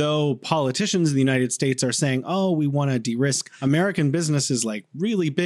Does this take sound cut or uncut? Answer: uncut